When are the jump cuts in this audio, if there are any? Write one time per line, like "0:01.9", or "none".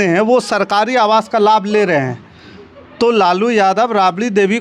none